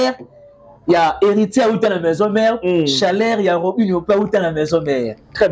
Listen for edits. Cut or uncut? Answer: uncut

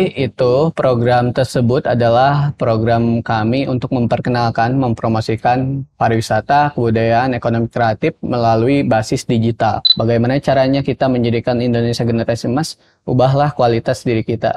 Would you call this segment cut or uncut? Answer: cut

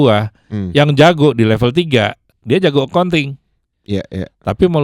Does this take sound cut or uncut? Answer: cut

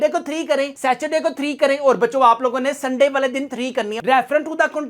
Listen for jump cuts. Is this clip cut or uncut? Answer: cut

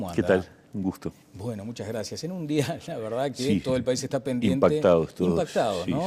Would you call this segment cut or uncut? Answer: uncut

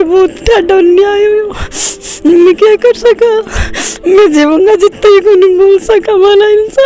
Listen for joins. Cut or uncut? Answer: uncut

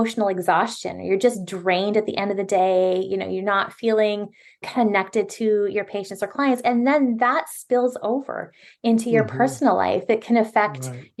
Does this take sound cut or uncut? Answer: uncut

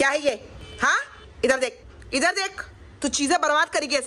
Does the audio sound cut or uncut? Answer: uncut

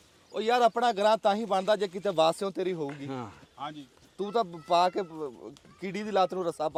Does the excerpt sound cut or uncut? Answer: uncut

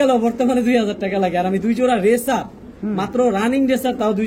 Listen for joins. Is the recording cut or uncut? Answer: uncut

